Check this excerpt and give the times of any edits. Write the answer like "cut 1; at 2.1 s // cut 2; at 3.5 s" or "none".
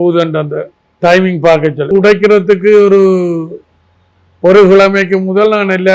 cut 1; at 1.9 s